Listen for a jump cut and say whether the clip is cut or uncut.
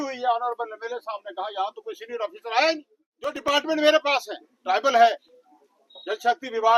cut